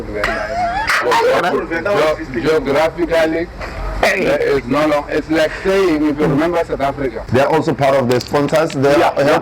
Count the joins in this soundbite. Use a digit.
1